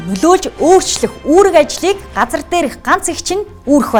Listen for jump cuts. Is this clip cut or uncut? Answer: uncut